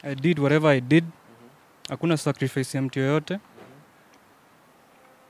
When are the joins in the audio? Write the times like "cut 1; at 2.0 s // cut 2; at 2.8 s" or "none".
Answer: none